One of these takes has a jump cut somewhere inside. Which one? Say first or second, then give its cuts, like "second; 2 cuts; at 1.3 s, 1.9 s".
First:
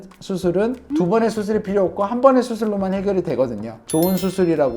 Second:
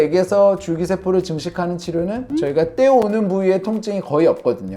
first; 1 cut; at 3.8 s